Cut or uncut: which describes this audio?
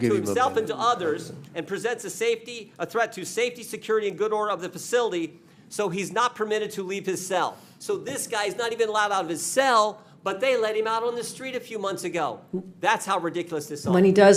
uncut